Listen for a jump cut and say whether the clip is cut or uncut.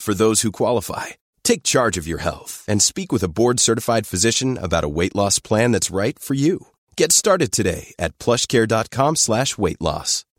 uncut